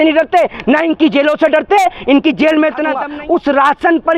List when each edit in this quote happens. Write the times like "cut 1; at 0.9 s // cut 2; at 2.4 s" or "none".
cut 1; at 3.0 s